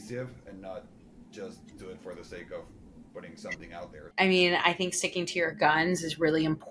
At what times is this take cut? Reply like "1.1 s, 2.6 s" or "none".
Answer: 4.1 s